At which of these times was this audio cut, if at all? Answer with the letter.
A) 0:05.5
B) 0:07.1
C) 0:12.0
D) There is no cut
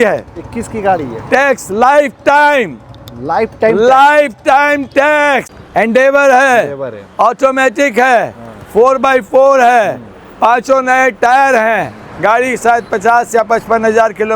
A